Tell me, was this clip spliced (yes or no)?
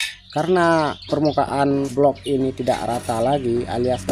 yes